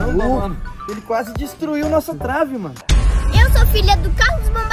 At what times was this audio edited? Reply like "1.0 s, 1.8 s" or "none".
2.8 s

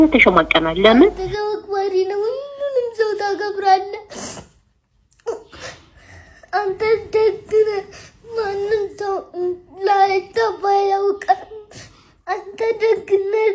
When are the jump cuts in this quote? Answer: 1.3 s

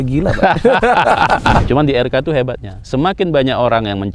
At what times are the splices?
1.6 s

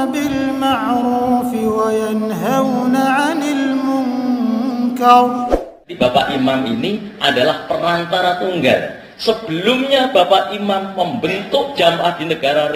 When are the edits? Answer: 5.9 s

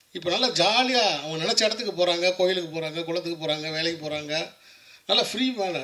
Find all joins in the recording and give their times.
none

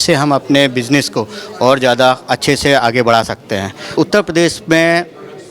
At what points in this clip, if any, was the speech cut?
3.9 s

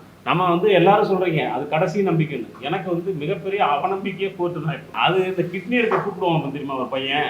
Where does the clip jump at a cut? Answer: 4.9 s

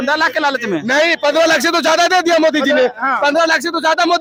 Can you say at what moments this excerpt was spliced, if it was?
none

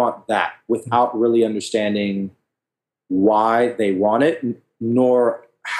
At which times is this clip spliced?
none

